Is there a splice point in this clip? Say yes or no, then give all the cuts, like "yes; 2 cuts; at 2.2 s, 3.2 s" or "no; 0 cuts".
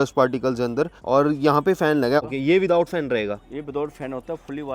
yes; 2 cuts; at 1.0 s, 2.2 s